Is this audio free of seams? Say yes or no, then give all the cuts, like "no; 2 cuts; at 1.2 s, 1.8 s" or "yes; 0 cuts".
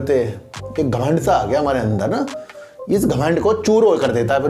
yes; 0 cuts